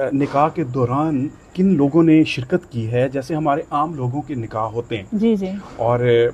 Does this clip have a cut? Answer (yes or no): no